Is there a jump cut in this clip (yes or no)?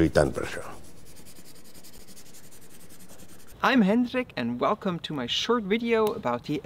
yes